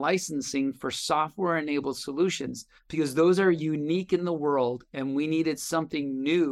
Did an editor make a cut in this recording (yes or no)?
no